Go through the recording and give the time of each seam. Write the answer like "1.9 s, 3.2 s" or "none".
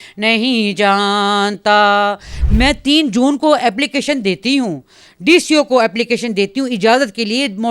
2.3 s